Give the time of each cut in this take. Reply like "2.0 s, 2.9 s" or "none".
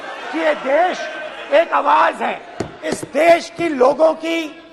3.0 s

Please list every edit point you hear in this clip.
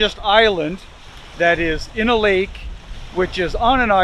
none

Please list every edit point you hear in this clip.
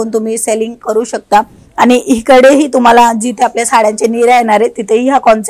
1.6 s

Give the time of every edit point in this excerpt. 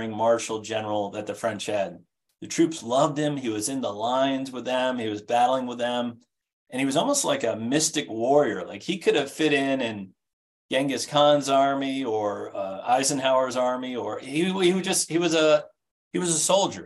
none

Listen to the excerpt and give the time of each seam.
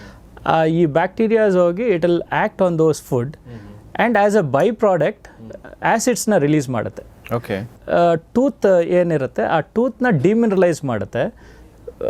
7.7 s

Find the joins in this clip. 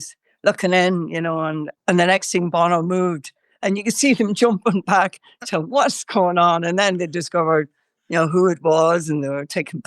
none

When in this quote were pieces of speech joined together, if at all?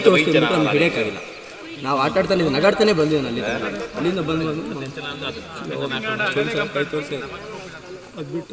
none

